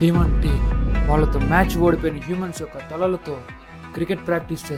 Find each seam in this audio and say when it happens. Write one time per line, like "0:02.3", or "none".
none